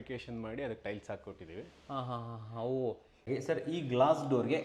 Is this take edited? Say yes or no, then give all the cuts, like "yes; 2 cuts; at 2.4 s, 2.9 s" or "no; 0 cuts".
yes; 1 cut; at 3.3 s